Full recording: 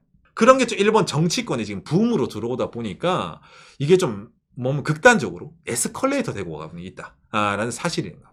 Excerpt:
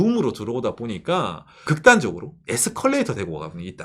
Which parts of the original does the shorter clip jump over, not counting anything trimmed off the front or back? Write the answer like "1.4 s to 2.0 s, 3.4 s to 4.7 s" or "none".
3.6 s to 4.8 s